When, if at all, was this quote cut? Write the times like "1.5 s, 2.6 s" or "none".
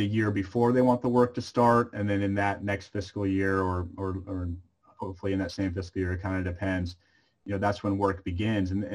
none